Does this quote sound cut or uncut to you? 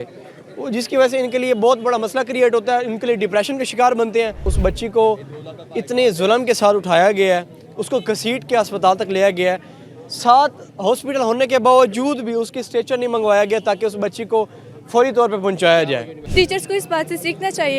cut